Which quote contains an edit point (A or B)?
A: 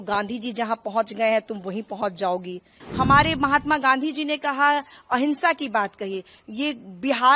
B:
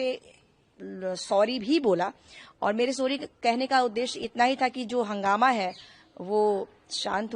A